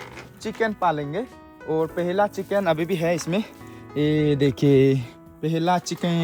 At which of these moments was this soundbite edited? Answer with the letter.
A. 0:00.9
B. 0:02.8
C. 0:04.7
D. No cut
D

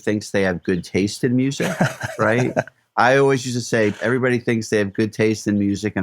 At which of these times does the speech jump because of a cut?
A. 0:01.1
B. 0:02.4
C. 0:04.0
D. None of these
C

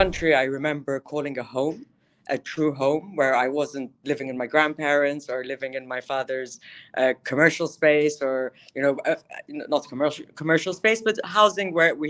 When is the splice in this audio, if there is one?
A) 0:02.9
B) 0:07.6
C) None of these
C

